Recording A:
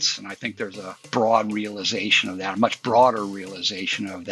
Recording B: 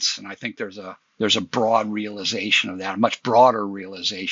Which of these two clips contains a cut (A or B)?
A